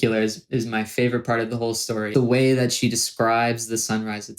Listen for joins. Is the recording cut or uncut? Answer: cut